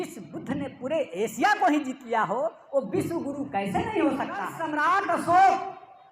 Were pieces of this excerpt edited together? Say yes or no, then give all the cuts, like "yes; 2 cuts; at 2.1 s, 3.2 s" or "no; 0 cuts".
yes; 1 cut; at 4.6 s